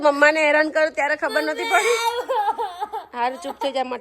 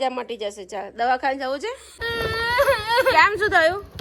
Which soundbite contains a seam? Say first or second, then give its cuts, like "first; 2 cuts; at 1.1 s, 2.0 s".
second; 1 cut; at 2.0 s